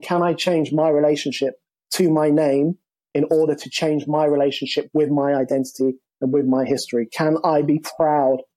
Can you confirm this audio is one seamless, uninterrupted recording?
yes; 0 cuts

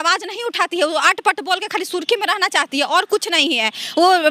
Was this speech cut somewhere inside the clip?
no; 0 cuts

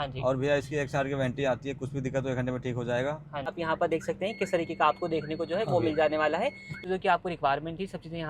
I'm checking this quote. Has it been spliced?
yes; 2 cuts; at 3.6 s, 6.7 s

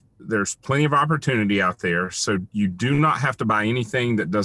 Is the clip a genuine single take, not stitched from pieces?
yes; 0 cuts

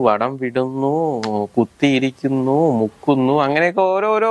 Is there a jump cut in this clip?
no; 0 cuts

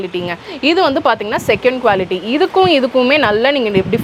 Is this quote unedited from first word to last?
yes; 0 cuts

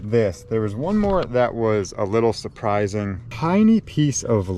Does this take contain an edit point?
yes; 1 cut; at 3.2 s

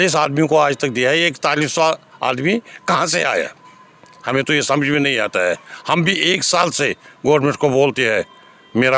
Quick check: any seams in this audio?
no; 0 cuts

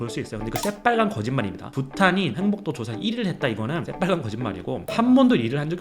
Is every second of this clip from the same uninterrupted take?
no; 1 cut; at 3.9 s

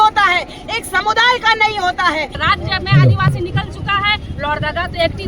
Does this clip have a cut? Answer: yes; 1 cut; at 2.4 s

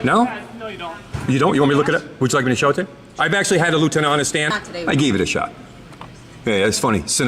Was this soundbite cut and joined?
yes; 1 cut; at 4.6 s

